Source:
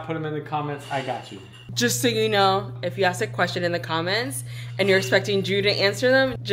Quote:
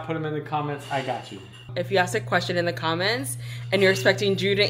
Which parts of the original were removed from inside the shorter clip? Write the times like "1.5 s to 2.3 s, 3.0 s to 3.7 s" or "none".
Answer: 1.7 s to 2.7 s